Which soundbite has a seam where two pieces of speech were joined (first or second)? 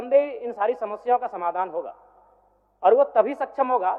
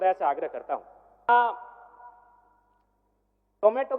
second